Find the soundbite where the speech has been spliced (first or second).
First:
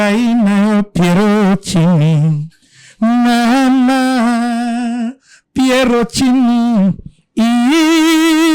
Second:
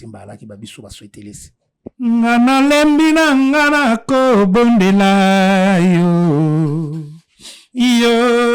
second